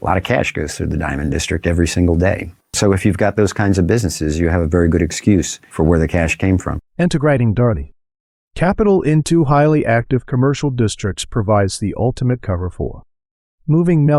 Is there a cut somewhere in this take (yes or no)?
no